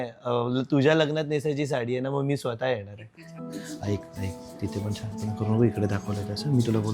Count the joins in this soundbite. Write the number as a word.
one